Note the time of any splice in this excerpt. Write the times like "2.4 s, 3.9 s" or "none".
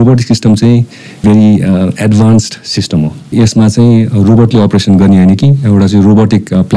1.2 s, 3.3 s